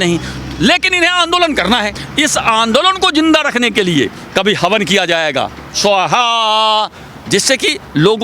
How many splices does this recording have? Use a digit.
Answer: 1